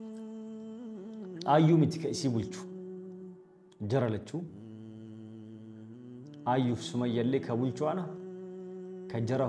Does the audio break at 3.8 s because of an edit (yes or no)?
no